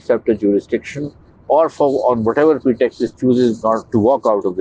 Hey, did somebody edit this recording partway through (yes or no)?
no